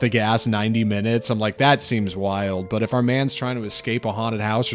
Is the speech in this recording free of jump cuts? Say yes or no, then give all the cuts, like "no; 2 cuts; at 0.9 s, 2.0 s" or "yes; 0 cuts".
yes; 0 cuts